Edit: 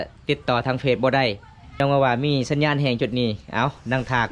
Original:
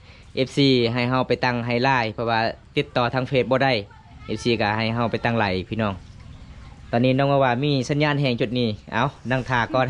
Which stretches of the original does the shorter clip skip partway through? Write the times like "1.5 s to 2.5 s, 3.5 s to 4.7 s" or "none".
4.3 s to 7.2 s